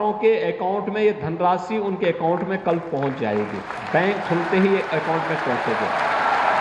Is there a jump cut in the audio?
no; 0 cuts

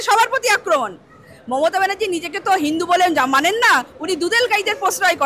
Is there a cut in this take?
no; 0 cuts

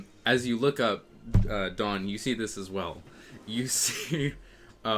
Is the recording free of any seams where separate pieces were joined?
yes; 0 cuts

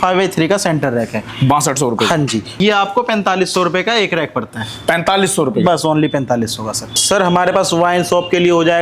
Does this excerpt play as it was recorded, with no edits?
no; 2 cuts; at 2.5 s, 6.9 s

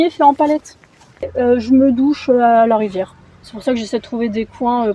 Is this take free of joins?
no; 1 cut; at 1.3 s

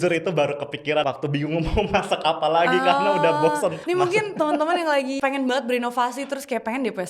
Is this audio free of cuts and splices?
no; 3 cuts; at 1.0 s, 3.8 s, 5.1 s

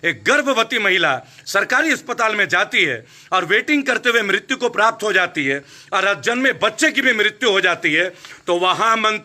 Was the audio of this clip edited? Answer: no; 0 cuts

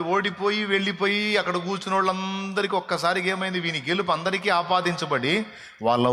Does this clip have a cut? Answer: no; 0 cuts

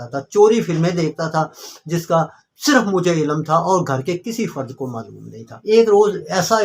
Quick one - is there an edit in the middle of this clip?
yes; 1 cut; at 5.5 s

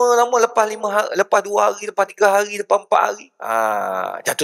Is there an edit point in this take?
yes; 1 cut; at 3.3 s

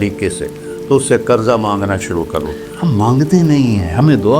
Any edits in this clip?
yes; 1 cut; at 2.7 s

